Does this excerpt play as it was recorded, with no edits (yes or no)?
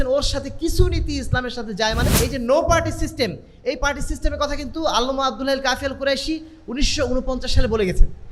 no